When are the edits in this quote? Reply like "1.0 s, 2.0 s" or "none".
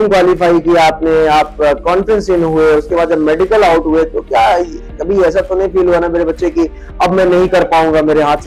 none